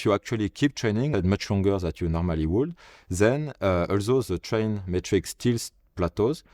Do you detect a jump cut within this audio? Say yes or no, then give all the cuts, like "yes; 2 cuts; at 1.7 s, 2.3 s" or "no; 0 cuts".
yes; 1 cut; at 1.1 s